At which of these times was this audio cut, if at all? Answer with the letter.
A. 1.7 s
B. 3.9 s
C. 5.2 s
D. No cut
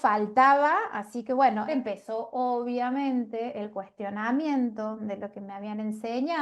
A